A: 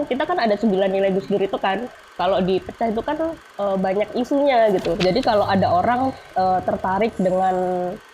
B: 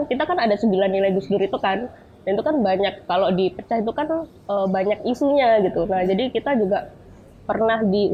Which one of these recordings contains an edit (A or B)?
A